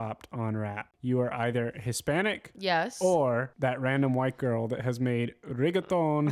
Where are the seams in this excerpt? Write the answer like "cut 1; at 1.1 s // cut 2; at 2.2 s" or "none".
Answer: cut 1; at 0.9 s // cut 2; at 2.5 s // cut 3; at 3.5 s

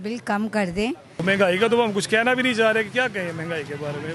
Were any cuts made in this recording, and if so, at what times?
cut 1; at 1.2 s

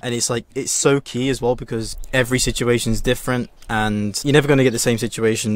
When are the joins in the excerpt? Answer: cut 1; at 2.0 s

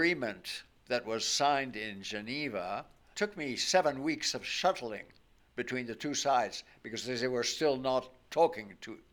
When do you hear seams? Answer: none

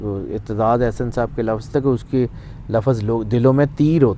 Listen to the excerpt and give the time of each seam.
none

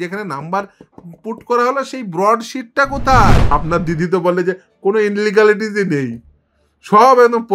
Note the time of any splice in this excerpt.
cut 1; at 3.5 s

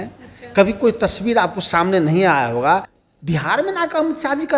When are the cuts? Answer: cut 1; at 2.9 s

